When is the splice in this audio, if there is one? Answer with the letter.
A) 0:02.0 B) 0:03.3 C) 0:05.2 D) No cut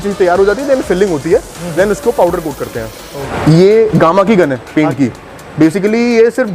B